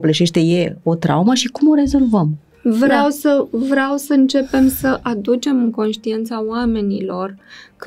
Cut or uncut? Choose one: cut